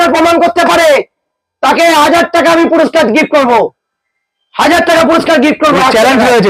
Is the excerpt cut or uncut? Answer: uncut